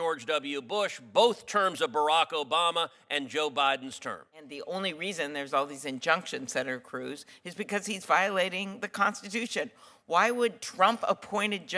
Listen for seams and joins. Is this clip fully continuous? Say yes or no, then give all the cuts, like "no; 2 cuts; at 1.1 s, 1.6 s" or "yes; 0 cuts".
no; 1 cut; at 4.5 s